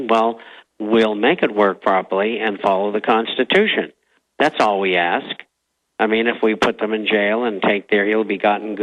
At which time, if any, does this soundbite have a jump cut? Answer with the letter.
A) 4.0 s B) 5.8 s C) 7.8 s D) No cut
D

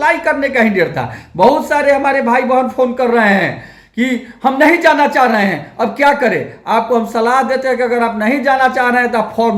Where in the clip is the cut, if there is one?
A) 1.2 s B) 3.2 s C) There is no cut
C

